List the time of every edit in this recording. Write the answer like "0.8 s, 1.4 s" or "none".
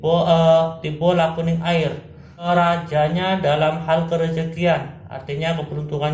2.4 s